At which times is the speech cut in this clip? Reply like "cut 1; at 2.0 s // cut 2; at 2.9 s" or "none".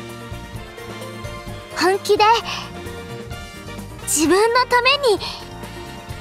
cut 1; at 2.5 s // cut 2; at 4.1 s